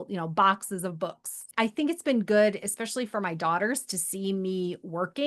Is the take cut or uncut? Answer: cut